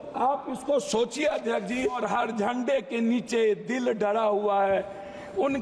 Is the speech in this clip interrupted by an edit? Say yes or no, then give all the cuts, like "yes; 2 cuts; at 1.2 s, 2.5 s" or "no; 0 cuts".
yes; 1 cut; at 2.0 s